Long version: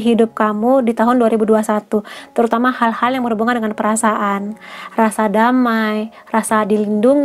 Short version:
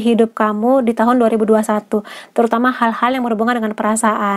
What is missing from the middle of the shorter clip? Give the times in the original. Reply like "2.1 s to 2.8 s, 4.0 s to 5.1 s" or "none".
none